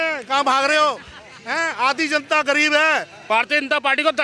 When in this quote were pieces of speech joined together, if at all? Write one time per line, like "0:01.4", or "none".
0:03.1

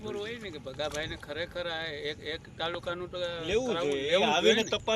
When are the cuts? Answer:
none

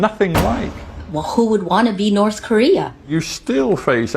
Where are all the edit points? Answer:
0:03.1

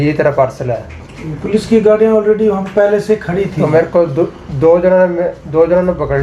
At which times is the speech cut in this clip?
none

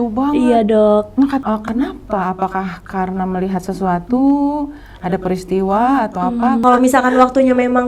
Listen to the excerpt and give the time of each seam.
0:01.4
0:06.6

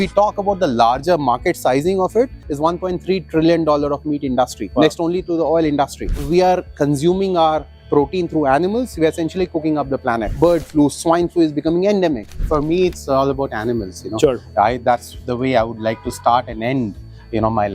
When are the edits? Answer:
0:02.4
0:06.1
0:10.3
0:12.4

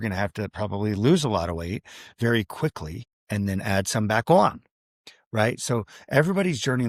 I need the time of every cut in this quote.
none

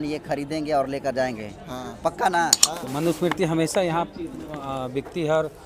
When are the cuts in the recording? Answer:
0:02.6

